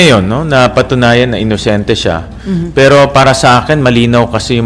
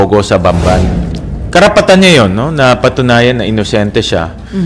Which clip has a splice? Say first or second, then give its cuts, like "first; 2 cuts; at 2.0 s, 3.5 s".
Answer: second; 1 cut; at 1.0 s